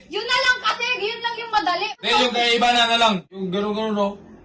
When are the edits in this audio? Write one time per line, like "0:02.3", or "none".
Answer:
0:01.9
0:03.3